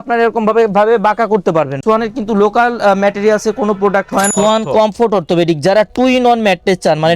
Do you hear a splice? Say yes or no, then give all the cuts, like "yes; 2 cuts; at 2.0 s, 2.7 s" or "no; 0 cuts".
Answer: yes; 2 cuts; at 1.8 s, 4.3 s